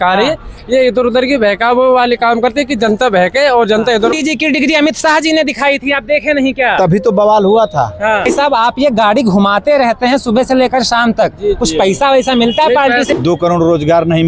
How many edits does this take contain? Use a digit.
3